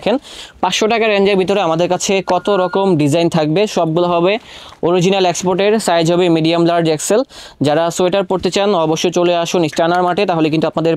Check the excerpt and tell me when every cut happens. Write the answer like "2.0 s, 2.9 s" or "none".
none